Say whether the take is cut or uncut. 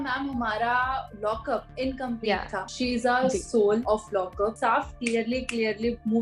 cut